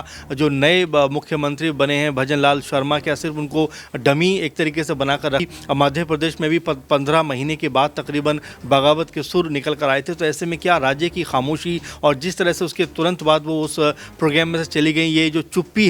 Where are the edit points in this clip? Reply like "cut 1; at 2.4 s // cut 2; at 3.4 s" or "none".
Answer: cut 1; at 5.4 s